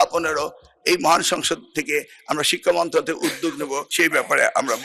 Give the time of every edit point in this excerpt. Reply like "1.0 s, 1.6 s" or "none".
3.9 s